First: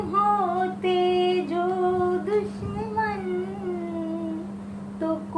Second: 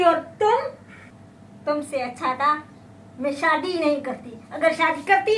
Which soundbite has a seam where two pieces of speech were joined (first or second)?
second